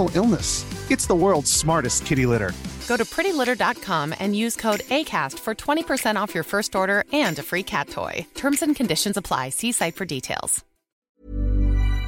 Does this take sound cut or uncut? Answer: cut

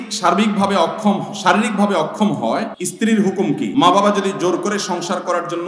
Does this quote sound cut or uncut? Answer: cut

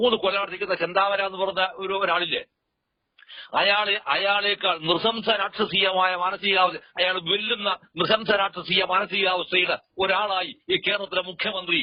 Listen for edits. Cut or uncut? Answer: uncut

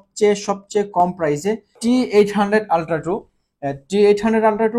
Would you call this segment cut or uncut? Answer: cut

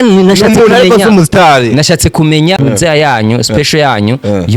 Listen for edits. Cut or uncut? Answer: cut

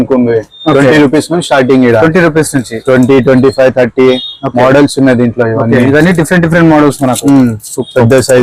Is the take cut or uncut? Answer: uncut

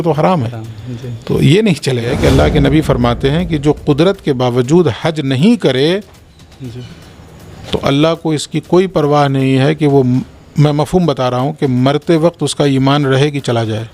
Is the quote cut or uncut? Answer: cut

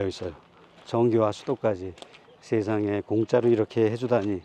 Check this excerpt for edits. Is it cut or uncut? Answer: uncut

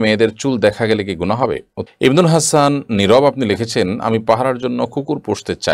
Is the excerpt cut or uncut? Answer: cut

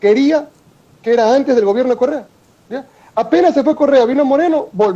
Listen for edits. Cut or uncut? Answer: uncut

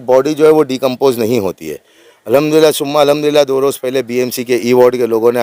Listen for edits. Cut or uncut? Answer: uncut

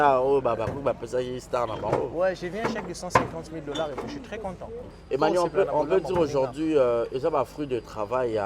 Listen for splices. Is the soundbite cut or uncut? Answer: cut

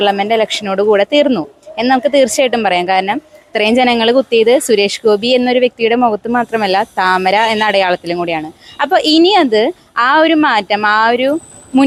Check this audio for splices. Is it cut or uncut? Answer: uncut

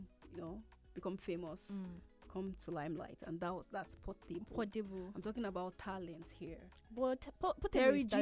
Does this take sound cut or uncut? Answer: uncut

